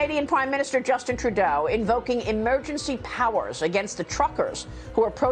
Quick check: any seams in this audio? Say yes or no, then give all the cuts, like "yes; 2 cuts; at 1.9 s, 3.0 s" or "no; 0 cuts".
no; 0 cuts